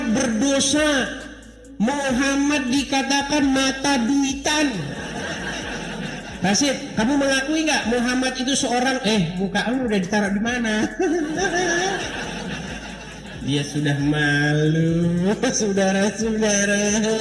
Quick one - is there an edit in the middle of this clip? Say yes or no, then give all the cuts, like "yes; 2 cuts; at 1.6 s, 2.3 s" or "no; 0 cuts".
yes; 1 cut; at 6.1 s